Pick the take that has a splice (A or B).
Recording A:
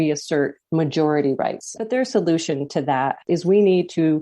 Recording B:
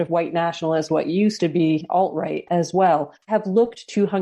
A